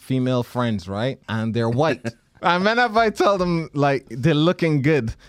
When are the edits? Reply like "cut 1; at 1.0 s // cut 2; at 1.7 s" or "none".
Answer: cut 1; at 1.2 s // cut 2; at 2.2 s